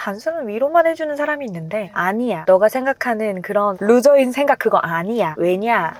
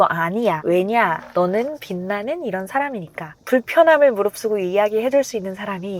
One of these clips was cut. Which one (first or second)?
second